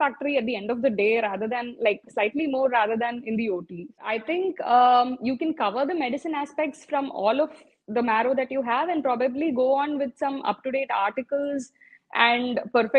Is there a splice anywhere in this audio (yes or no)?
yes